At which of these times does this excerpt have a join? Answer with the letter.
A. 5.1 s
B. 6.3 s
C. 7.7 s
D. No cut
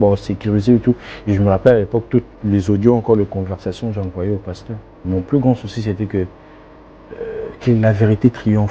A